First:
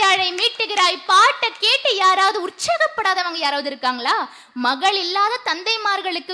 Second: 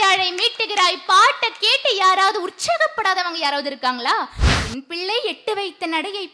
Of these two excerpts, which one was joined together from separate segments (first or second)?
second